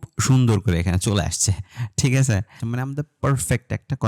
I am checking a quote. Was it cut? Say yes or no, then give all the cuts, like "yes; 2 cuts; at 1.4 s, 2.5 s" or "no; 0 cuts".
yes; 1 cut; at 2.6 s